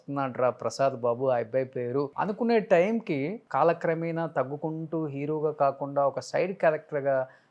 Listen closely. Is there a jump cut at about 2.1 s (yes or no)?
yes